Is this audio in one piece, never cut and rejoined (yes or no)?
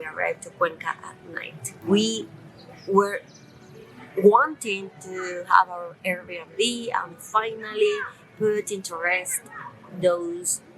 no